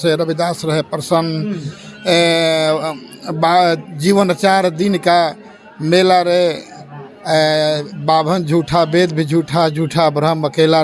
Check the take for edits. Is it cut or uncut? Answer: uncut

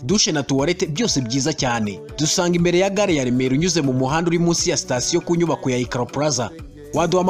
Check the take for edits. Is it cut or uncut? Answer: uncut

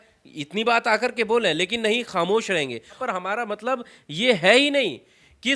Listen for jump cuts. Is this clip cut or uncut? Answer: cut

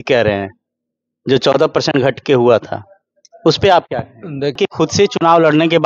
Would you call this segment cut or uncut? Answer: cut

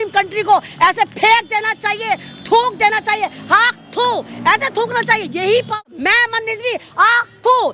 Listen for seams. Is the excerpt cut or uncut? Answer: cut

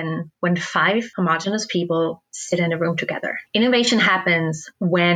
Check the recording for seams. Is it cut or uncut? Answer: cut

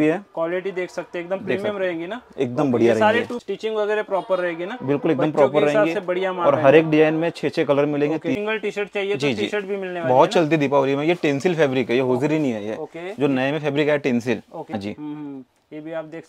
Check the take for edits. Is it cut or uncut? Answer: cut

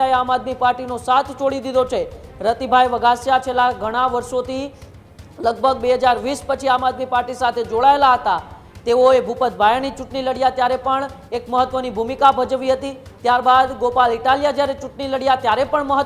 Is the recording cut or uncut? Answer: uncut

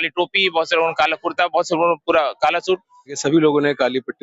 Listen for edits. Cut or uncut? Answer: cut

